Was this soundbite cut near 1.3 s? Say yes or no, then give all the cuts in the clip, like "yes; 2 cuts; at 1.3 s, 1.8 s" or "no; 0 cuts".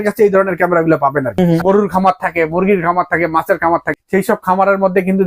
yes; 2 cuts; at 1.3 s, 4.0 s